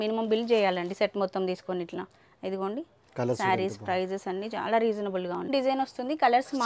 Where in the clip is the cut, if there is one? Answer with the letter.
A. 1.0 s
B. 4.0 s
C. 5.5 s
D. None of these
C